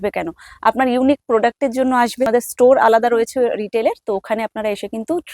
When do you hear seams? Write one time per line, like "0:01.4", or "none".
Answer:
0:02.3